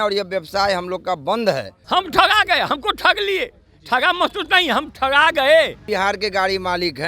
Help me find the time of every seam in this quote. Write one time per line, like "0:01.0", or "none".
0:01.7
0:05.8